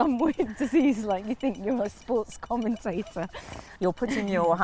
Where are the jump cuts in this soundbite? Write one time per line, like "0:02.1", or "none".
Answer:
0:03.6